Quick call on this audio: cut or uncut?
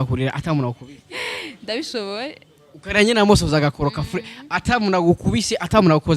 uncut